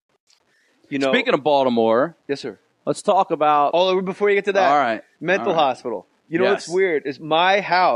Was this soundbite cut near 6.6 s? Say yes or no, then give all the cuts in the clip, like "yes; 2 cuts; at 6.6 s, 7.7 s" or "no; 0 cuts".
no; 1 cut; at 1.9 s